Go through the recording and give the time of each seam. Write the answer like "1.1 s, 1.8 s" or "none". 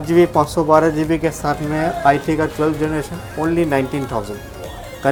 none